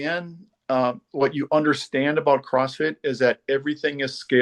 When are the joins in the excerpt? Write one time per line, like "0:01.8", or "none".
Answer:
none